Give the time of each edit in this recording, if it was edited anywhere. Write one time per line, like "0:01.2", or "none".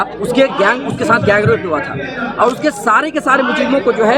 none